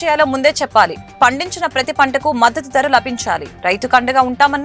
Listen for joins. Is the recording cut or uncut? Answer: uncut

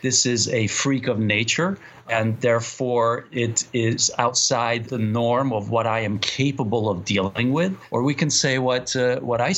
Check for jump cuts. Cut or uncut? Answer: cut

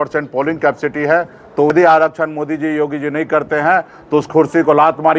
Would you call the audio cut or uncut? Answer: cut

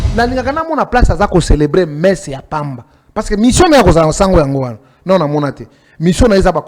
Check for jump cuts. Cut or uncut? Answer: uncut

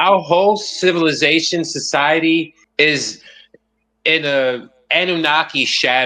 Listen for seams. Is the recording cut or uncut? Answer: cut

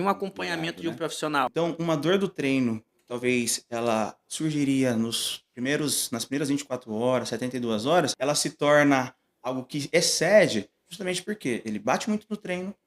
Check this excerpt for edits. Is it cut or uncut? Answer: cut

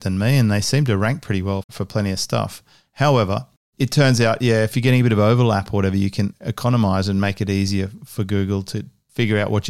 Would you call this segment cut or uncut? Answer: cut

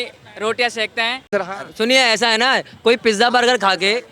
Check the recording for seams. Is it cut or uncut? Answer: cut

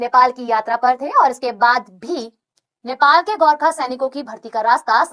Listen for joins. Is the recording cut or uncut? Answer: uncut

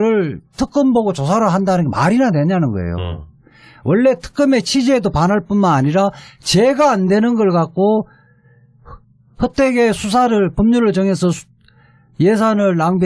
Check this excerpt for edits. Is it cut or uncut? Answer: uncut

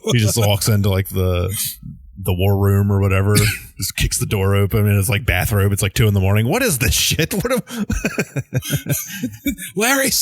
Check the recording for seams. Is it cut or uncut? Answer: uncut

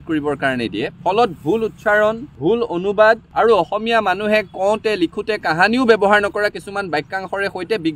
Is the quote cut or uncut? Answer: uncut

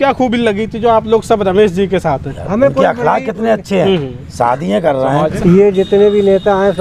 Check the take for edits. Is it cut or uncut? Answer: cut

